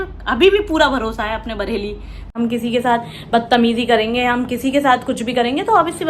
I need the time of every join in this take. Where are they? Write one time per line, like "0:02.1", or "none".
0:02.3